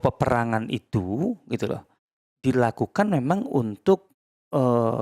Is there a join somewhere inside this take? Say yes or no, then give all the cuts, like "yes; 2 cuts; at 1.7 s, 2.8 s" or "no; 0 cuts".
no; 0 cuts